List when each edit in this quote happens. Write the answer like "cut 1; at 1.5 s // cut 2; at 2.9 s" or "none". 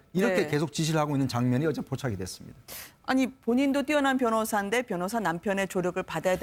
none